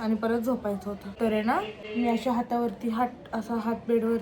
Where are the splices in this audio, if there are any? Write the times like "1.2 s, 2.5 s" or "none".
1.1 s, 1.8 s